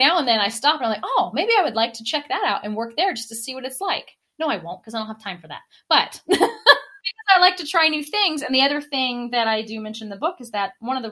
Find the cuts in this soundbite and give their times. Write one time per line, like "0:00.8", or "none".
0:07.1

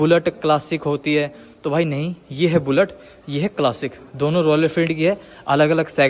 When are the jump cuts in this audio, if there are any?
none

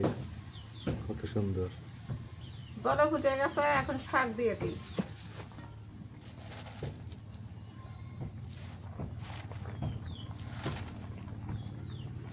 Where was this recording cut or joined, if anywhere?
none

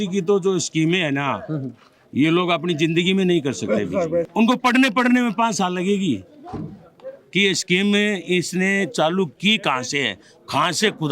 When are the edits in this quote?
0:04.3

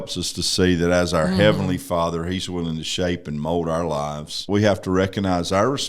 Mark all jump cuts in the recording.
0:04.4

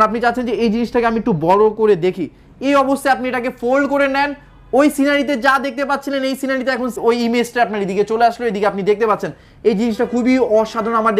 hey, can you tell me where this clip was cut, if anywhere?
0:07.0

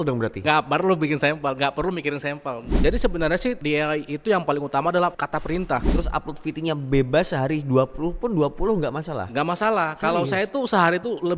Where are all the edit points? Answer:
0:02.7
0:05.9

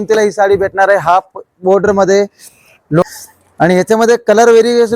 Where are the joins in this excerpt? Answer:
0:03.0

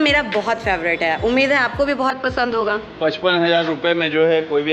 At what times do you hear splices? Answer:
0:02.8

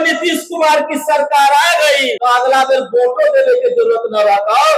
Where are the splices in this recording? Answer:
0:02.1

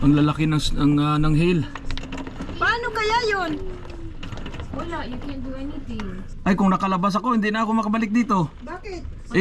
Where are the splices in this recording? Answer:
0:06.3

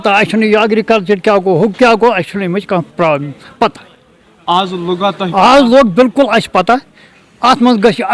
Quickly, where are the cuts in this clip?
none

